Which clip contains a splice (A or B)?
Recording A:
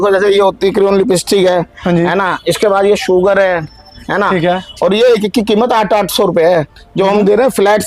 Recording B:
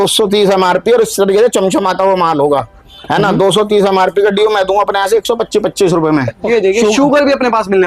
B